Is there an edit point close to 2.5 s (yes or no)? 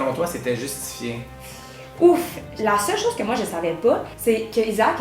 yes